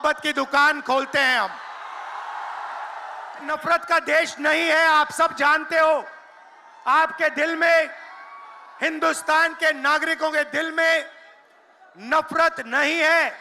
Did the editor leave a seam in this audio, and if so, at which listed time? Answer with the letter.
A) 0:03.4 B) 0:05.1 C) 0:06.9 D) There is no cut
A